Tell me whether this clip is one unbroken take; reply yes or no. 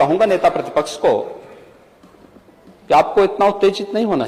yes